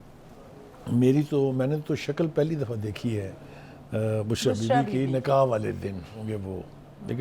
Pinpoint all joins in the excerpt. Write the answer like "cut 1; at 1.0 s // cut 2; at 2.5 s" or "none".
cut 1; at 6.2 s